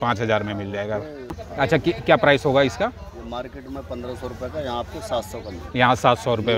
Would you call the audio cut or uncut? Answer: cut